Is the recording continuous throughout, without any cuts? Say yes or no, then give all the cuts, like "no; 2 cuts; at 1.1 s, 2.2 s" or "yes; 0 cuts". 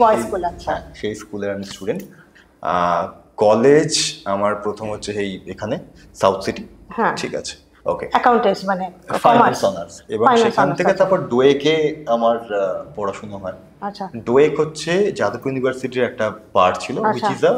yes; 0 cuts